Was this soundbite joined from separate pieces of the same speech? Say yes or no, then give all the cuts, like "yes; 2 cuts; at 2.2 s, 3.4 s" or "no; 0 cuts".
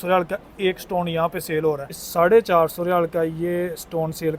yes; 1 cut; at 2.0 s